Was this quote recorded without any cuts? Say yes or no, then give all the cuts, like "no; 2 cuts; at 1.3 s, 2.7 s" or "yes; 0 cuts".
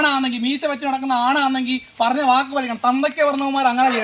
yes; 0 cuts